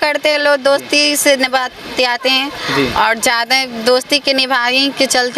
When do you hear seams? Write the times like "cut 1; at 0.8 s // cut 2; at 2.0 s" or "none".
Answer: none